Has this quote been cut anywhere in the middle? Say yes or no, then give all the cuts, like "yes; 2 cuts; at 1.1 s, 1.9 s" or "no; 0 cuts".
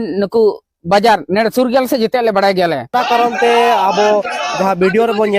yes; 1 cut; at 2.9 s